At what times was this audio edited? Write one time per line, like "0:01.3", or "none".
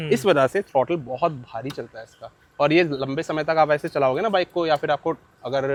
none